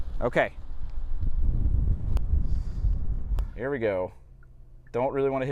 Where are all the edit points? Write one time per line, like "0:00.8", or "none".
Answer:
0:03.4